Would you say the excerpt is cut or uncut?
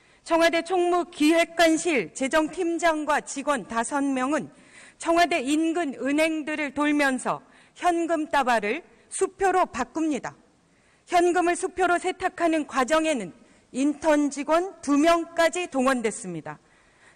uncut